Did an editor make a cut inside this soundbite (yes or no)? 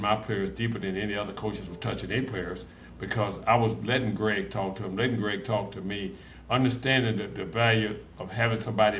no